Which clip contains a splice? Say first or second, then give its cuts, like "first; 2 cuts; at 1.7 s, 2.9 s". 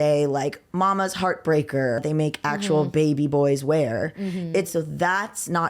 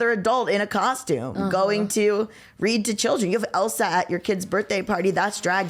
first; 2 cuts; at 2.0 s, 4.7 s